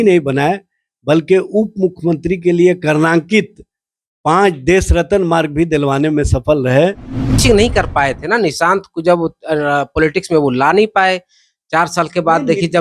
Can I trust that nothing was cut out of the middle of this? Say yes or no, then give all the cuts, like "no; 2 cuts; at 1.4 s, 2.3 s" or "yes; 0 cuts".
no; 1 cut; at 7.4 s